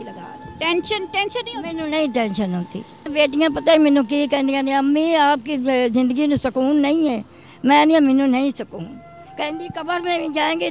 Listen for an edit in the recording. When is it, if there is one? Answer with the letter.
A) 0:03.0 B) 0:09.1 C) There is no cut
A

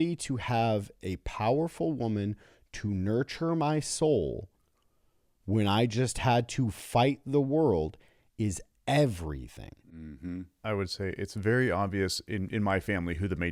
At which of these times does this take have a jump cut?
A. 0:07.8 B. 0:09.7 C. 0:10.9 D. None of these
D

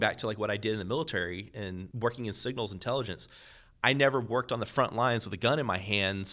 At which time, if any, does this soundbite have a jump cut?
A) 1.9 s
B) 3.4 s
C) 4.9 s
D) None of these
A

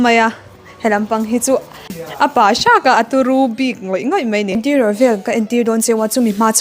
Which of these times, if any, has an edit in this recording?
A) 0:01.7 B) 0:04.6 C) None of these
B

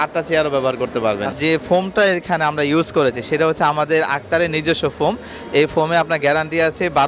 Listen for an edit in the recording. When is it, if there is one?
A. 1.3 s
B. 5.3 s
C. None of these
A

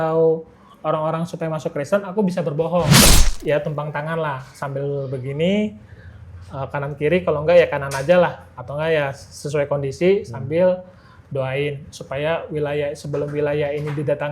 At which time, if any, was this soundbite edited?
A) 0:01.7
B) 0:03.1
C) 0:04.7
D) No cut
B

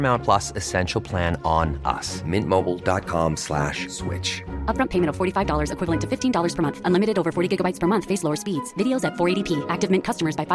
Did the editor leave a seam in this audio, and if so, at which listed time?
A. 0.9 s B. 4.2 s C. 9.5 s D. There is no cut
D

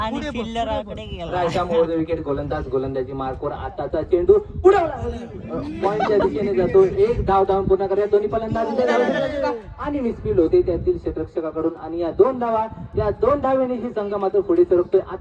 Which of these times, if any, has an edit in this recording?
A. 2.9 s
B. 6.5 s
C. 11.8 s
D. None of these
D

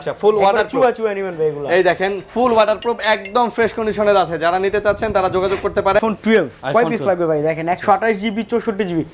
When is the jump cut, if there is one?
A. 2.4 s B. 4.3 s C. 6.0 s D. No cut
C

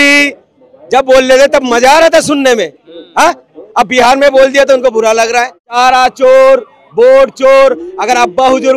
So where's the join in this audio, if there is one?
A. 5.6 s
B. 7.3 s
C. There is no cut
A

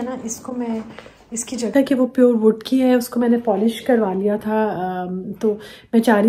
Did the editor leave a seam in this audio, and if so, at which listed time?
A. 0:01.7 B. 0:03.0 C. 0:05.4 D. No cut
A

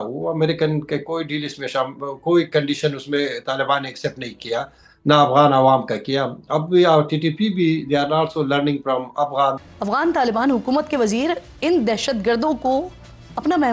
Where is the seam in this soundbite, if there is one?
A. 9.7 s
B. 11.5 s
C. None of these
A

